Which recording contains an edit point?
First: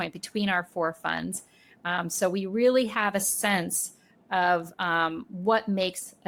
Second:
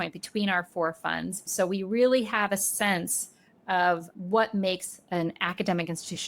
second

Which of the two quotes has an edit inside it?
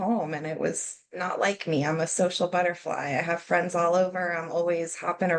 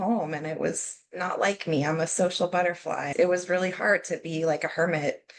second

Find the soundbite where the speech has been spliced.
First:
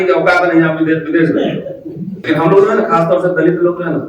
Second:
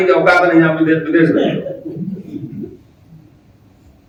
first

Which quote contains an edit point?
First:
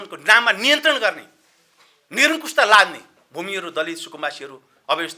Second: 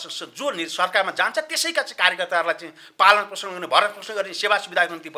first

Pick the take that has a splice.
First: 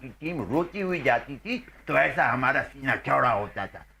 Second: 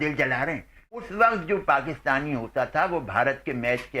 second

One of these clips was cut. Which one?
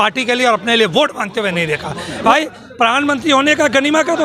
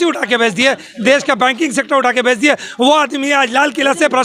first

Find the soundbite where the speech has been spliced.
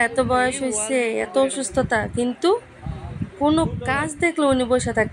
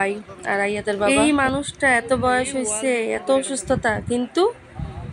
second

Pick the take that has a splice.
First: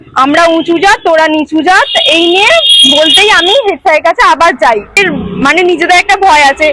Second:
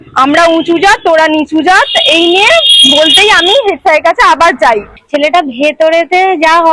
second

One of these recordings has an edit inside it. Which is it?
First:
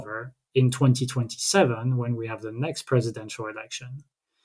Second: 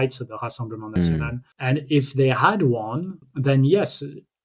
second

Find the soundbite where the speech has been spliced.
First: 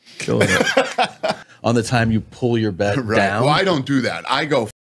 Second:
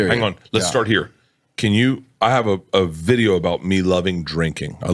first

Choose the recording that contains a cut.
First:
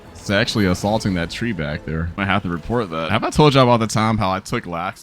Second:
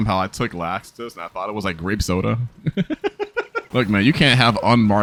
first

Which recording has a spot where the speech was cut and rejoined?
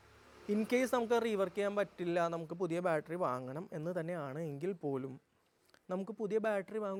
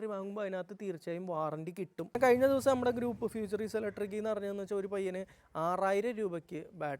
second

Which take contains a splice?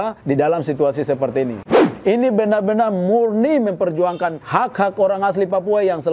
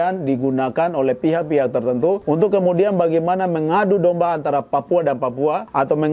first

